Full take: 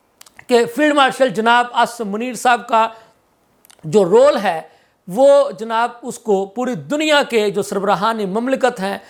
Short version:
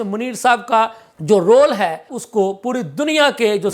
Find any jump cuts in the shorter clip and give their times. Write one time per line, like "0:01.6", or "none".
0:01.1
0:02.1